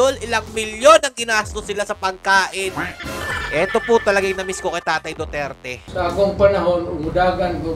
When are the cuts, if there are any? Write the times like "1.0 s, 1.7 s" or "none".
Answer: 3.0 s

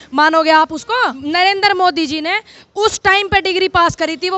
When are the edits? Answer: 1.0 s

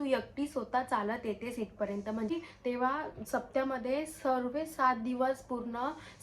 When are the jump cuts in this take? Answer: 2.3 s

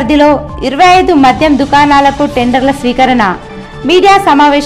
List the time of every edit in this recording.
none

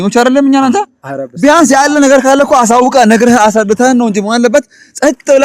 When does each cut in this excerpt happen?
none

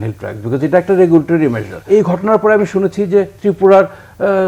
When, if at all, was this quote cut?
1.9 s

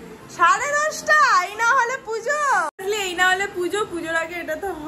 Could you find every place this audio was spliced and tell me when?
2.8 s

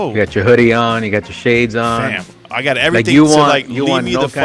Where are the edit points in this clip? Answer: none

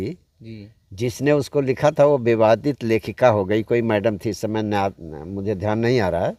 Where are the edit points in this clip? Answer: none

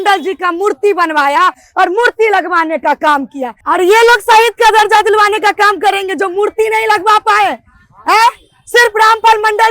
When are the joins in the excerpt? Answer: none

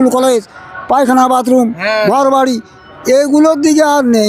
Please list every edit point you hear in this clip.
none

